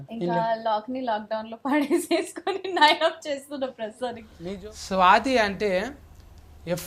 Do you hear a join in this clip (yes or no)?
yes